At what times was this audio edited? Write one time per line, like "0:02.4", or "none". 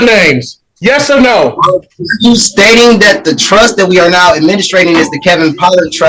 none